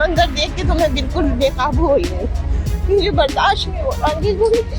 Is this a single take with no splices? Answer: yes; 0 cuts

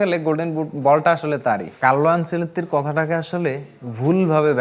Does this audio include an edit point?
yes; 1 cut; at 1.7 s

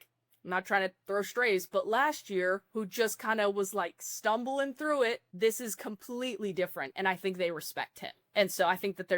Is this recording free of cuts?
no; 1 cut; at 5.3 s

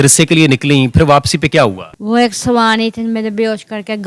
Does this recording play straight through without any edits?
no; 1 cut; at 1.9 s

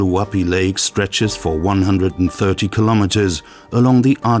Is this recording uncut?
no; 1 cut; at 2.7 s

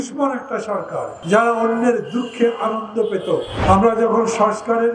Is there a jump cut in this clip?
yes; 2 cuts; at 1.1 s, 3.5 s

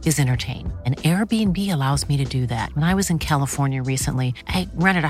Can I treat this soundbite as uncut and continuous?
yes; 0 cuts

